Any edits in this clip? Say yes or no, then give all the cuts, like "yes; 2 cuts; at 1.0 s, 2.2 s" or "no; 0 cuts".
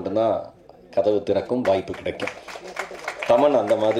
no; 0 cuts